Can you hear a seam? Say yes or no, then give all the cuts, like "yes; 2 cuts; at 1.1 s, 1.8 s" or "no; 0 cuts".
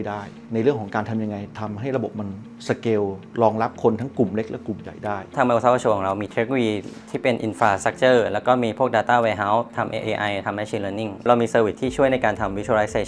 yes; 3 cuts; at 5.3 s, 9.7 s, 11.2 s